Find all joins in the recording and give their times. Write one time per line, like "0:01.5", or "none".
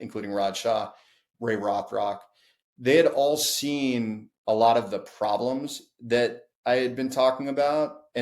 0:01.2